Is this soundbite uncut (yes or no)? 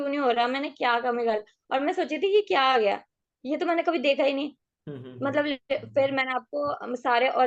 yes